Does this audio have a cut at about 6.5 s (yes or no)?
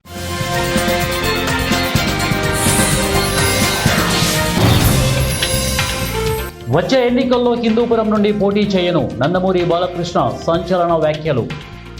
yes